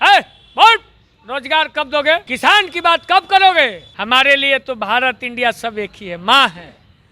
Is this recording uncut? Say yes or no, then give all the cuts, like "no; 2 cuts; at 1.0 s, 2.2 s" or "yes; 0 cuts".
no; 2 cuts; at 2.3 s, 3.9 s